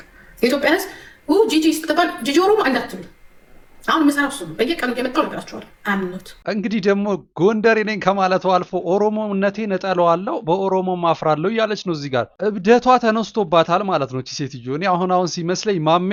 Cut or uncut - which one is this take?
uncut